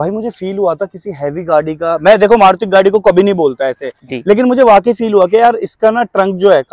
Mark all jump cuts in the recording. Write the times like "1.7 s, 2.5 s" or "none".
none

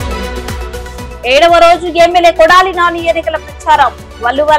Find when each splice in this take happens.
1.1 s

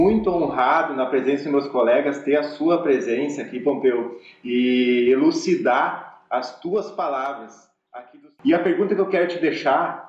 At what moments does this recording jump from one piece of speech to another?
8.3 s

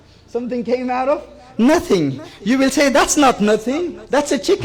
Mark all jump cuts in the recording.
none

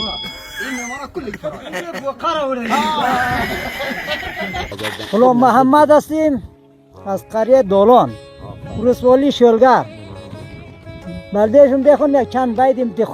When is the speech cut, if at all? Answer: 4.8 s

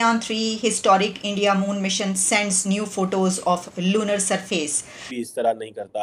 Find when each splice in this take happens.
5.1 s

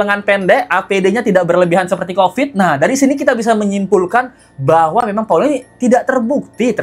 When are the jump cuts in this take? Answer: none

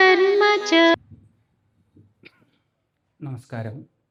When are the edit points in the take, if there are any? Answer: none

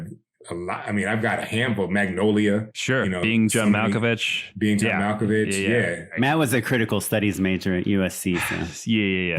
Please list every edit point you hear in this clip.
6.1 s

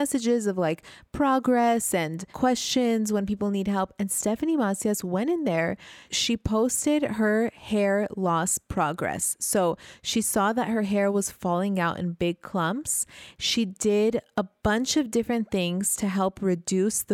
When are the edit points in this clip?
6.1 s

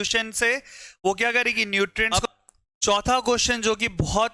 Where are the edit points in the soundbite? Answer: 2.1 s

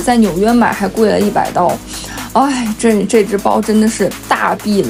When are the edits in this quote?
none

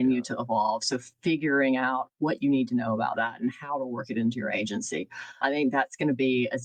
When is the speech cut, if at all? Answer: 5.4 s

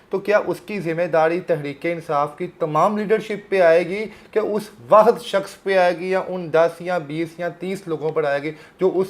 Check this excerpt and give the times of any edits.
none

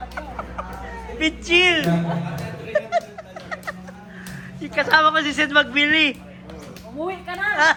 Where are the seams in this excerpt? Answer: none

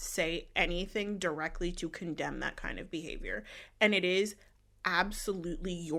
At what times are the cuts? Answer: none

